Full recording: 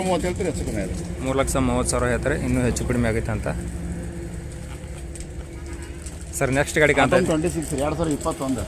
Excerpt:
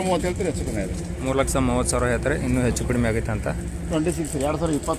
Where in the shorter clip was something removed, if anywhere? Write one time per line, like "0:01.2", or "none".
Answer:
0:03.9